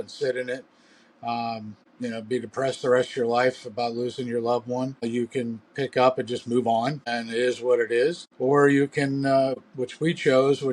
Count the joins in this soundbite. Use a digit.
5